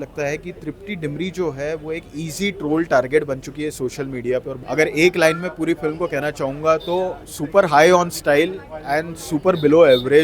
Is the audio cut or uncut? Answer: cut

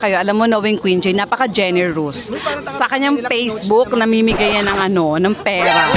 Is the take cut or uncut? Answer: uncut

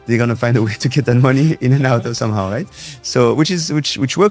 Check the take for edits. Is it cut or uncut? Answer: uncut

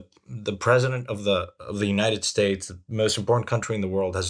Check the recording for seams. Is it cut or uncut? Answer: uncut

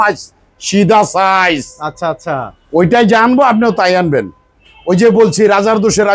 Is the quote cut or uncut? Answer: uncut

